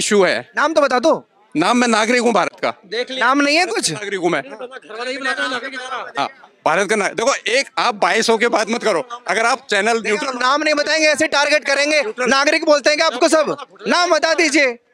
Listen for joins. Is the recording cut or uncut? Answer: uncut